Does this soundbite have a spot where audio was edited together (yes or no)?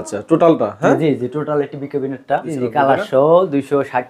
yes